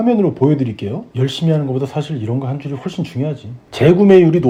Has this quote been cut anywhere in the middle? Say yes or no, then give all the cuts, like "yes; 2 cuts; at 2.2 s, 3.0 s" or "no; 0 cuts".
no; 0 cuts